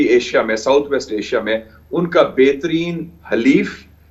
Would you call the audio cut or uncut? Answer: uncut